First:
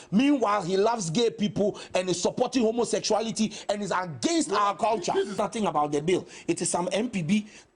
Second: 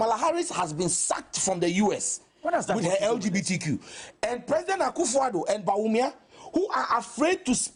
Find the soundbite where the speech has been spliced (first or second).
first